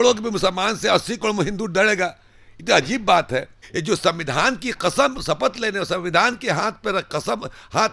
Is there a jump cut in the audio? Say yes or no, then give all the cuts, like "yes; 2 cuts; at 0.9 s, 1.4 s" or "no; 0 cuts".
yes; 1 cut; at 3.6 s